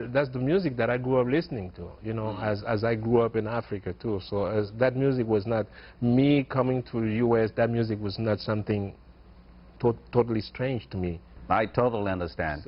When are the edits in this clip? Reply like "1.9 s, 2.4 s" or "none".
none